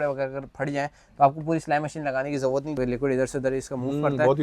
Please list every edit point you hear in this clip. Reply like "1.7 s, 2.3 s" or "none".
2.8 s